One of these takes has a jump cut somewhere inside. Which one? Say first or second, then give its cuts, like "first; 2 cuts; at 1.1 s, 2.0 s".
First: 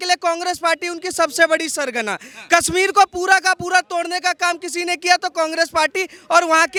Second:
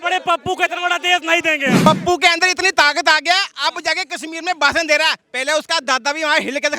second; 1 cut; at 1.8 s